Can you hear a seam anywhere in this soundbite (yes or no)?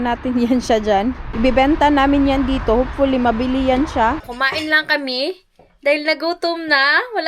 yes